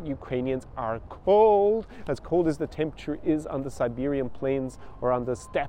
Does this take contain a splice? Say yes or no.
no